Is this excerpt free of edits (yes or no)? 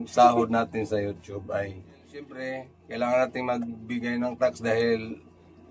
no